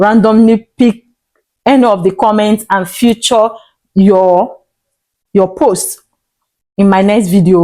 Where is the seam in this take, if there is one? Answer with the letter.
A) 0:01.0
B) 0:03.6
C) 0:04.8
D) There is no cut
D